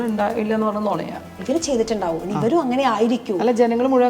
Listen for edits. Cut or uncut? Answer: cut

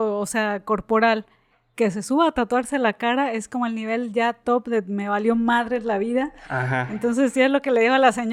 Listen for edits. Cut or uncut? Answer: uncut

